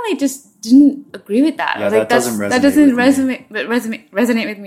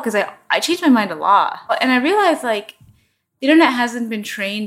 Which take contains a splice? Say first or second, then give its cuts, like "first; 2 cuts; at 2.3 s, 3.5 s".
second; 1 cut; at 1.8 s